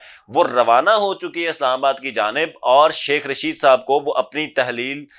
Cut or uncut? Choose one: uncut